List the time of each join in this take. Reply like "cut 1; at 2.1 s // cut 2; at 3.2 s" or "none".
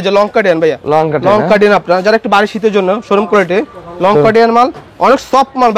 none